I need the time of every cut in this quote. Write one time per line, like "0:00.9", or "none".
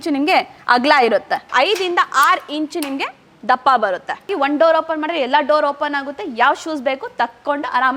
0:01.5
0:04.3

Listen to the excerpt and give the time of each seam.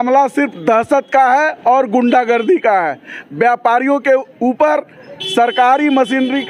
none

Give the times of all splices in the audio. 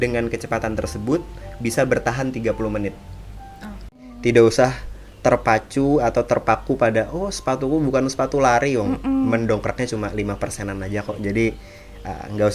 0:03.9

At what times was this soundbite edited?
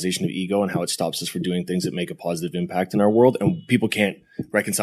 0:03.6

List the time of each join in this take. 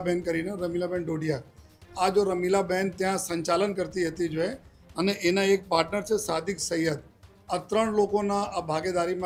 none

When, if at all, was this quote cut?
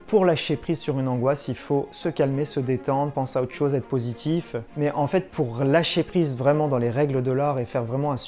0:04.6

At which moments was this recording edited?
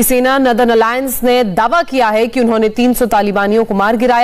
none

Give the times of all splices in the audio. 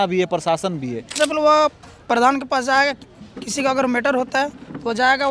0:01.1

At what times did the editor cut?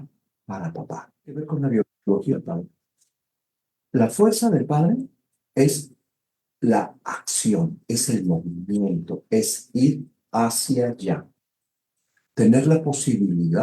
0:01.5

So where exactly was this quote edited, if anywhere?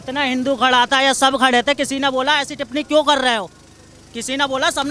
none

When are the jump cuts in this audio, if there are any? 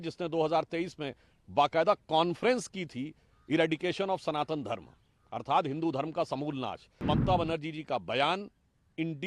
0:06.8

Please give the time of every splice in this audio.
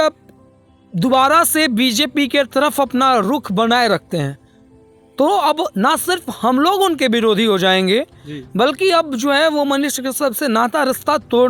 none

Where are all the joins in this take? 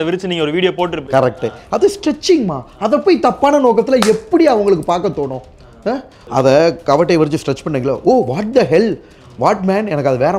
0:06.2

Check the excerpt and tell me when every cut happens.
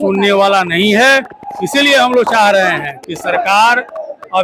none

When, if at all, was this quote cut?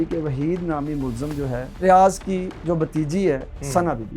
0:01.8

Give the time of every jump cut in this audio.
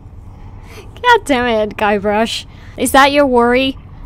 0:02.6

